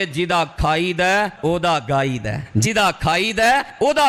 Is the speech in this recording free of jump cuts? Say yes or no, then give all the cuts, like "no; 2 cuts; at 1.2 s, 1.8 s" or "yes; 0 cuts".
yes; 0 cuts